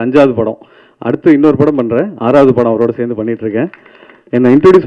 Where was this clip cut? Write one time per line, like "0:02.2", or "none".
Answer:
none